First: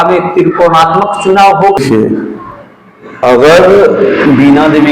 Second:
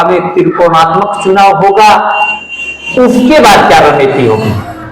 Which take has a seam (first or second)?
first